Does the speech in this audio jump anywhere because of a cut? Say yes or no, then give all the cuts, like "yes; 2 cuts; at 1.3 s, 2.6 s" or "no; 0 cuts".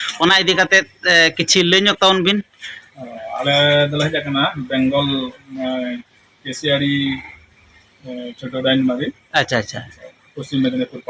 no; 0 cuts